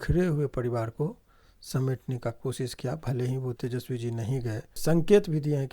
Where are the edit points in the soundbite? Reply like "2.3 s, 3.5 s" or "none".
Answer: 3.6 s, 4.8 s